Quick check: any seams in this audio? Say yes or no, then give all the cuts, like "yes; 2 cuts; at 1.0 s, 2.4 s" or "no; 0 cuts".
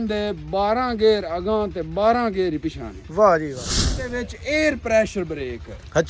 yes; 1 cut; at 3.8 s